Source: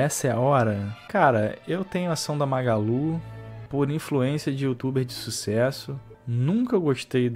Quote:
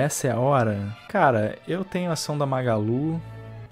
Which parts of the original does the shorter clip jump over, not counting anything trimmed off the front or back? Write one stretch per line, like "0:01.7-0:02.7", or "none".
none